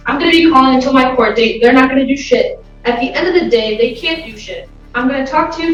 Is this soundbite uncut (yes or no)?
yes